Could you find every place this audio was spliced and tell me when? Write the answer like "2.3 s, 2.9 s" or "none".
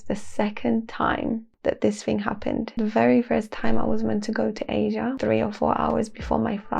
1.5 s, 2.7 s, 5.2 s

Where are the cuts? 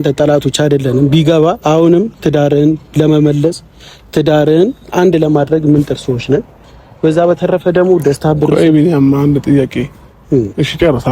none

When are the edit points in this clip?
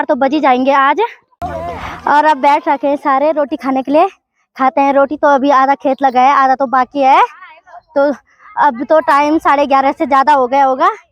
1.5 s

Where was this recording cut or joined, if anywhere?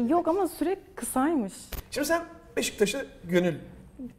1.7 s

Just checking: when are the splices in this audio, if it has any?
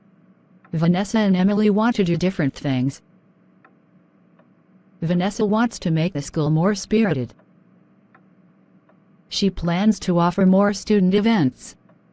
0.7 s, 1.5 s

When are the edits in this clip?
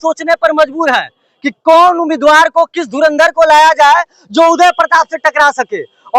none

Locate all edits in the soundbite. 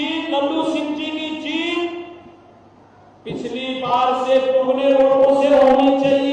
none

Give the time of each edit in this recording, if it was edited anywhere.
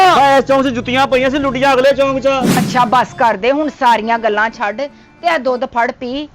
2.5 s

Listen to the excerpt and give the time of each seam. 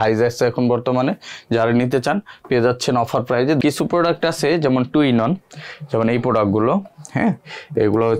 3.6 s

